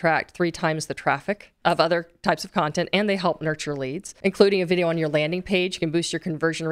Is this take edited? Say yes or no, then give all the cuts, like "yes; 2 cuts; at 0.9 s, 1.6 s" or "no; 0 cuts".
yes; 2 cuts; at 1.5 s, 4.0 s